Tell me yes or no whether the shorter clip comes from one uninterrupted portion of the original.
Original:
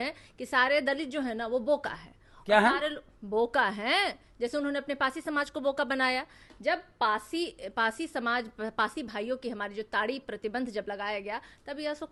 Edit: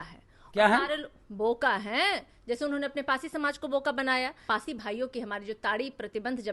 no